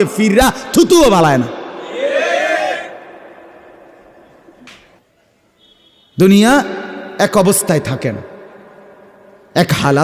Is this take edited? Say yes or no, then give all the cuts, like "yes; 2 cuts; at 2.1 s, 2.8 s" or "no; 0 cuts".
yes; 1 cut; at 5.1 s